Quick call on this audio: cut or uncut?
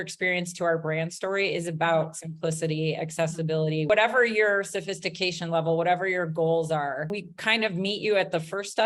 cut